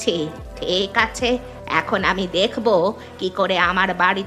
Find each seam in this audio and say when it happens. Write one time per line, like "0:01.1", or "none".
none